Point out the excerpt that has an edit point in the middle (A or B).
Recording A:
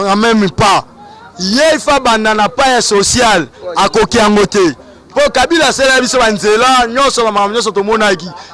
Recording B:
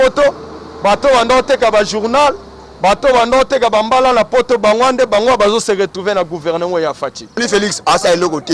B